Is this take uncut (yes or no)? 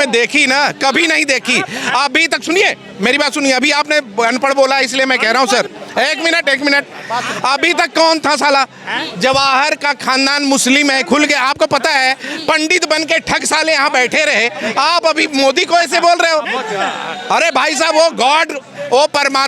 yes